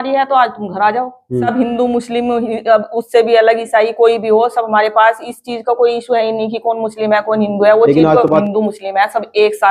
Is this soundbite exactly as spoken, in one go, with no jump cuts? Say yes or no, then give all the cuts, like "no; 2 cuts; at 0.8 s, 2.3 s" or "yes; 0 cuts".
no; 2 cuts; at 1.5 s, 8.4 s